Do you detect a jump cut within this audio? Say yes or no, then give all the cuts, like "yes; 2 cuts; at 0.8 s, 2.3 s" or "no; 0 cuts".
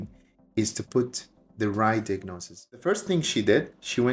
yes; 1 cut; at 2.8 s